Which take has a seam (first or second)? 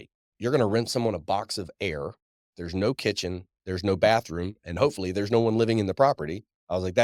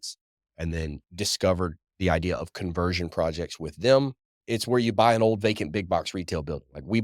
second